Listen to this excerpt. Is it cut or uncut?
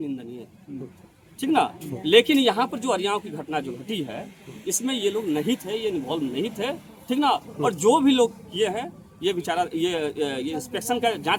uncut